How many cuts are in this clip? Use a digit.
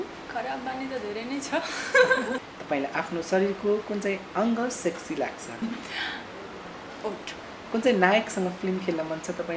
3